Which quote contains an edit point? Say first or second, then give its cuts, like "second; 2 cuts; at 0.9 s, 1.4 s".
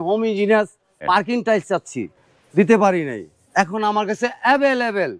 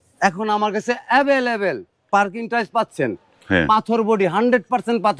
first; 2 cuts; at 1.0 s, 2.1 s